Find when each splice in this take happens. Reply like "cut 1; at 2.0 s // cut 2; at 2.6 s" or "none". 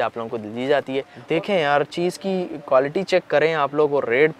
cut 1; at 1.2 s